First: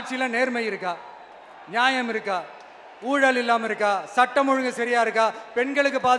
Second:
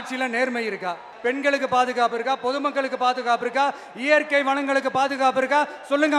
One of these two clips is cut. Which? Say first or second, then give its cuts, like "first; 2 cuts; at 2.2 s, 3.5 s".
second; 1 cut; at 1.1 s